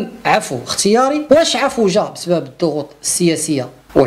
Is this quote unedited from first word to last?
no; 1 cut; at 1.2 s

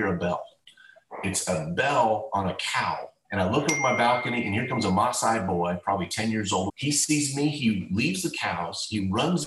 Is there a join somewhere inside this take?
yes; 2 cuts; at 3.1 s, 6.7 s

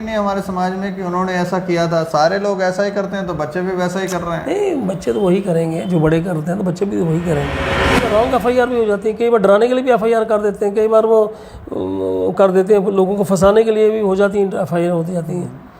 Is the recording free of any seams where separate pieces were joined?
no; 1 cut; at 7.9 s

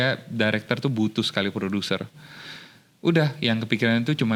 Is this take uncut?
yes; 0 cuts

